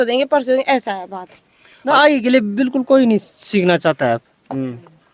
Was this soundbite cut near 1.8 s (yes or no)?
yes